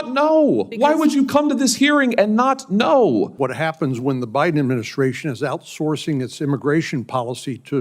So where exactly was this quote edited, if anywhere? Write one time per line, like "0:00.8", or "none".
0:03.3